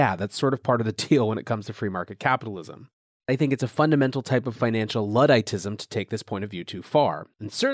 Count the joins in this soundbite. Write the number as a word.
one